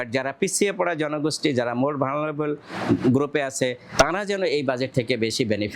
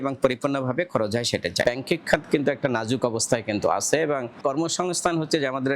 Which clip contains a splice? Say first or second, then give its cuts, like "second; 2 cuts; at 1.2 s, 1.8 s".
second; 2 cuts; at 1.6 s, 4.4 s